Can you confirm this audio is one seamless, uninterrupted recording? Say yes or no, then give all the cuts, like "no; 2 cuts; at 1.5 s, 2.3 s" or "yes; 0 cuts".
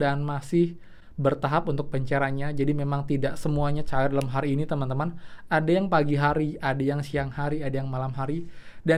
yes; 0 cuts